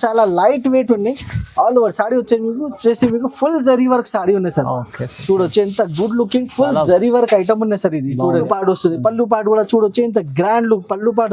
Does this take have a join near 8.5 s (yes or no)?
yes